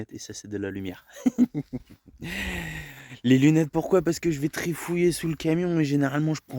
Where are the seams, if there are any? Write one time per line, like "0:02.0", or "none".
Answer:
none

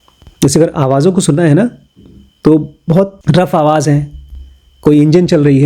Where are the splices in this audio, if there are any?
0:03.2

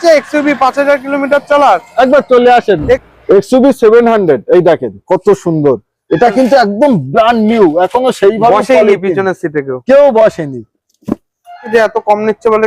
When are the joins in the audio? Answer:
0:03.0
0:11.7

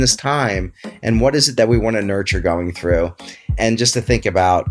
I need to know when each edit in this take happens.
0:03.5

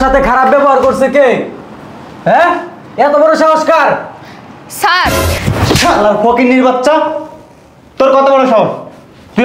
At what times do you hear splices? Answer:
0:05.1

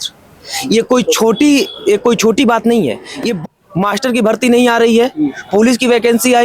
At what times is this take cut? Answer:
0:03.4

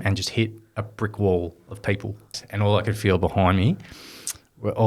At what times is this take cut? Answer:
0:02.3

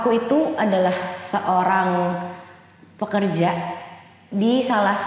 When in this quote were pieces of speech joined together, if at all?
none

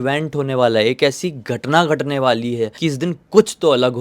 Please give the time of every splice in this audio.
0:02.7

